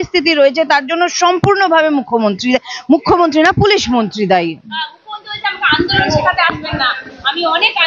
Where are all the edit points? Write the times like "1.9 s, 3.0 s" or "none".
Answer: none